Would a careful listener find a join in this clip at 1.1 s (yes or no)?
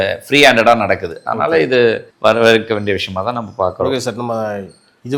no